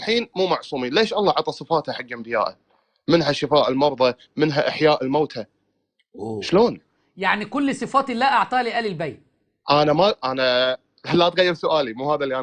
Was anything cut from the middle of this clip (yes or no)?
no